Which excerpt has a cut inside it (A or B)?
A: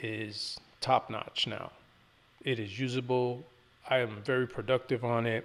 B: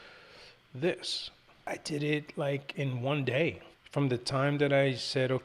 B